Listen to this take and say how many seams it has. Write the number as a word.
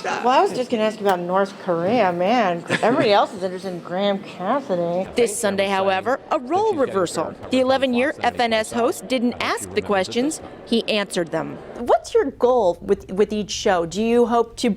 one